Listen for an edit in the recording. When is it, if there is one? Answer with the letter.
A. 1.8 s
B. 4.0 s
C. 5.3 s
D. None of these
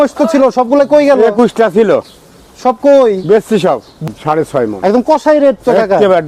B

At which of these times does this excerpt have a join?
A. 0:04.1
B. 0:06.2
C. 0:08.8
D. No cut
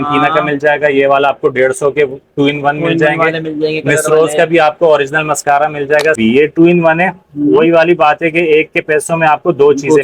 B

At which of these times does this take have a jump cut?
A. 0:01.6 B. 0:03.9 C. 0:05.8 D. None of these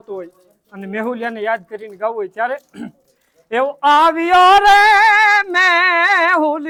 D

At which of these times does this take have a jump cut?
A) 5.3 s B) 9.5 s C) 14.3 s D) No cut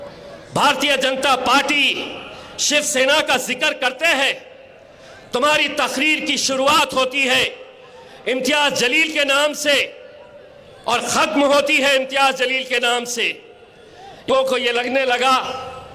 C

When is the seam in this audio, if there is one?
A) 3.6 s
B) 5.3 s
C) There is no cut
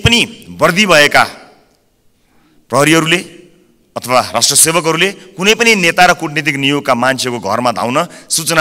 C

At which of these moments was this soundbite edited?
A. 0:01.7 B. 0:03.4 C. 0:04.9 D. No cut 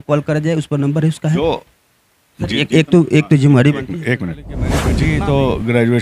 C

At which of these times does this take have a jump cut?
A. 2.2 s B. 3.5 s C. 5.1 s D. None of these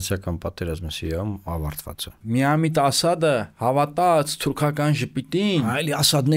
A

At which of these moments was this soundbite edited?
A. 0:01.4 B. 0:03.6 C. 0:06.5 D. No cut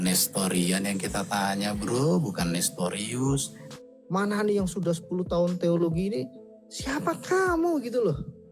B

